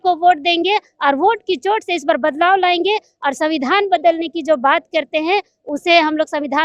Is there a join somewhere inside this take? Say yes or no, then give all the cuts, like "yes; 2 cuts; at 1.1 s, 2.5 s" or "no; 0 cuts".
no; 0 cuts